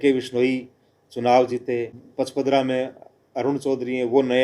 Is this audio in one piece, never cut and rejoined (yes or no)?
no